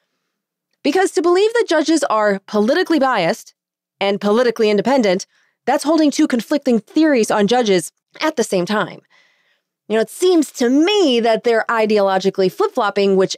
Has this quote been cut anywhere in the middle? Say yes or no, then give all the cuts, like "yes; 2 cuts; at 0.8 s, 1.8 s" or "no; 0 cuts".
yes; 1 cut; at 8.0 s